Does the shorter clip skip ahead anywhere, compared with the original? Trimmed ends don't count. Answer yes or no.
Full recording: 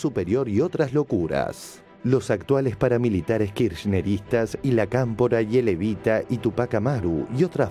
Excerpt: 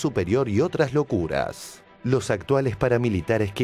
no